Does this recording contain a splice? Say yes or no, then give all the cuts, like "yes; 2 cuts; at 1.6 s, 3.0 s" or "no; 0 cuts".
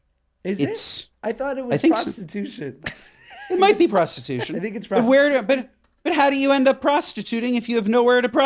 no; 0 cuts